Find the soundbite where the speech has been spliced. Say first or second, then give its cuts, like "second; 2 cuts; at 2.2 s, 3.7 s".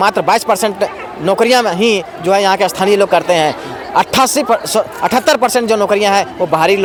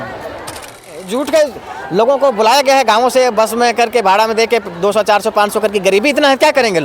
second; 1 cut; at 1.0 s